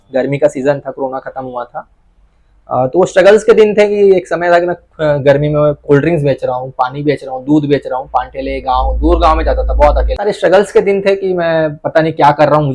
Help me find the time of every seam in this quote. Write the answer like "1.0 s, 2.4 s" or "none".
10.2 s